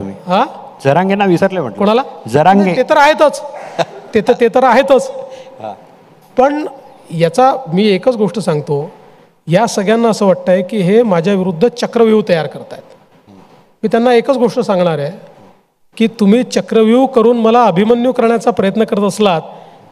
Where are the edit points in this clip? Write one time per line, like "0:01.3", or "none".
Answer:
none